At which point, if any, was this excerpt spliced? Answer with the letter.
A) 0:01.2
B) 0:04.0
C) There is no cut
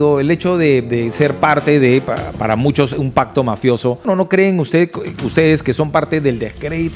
B